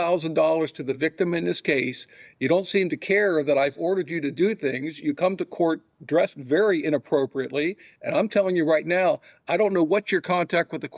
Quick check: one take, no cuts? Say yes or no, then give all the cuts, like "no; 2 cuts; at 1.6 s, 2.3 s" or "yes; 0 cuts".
yes; 0 cuts